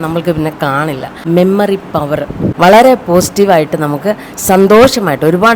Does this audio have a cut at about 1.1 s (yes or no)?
yes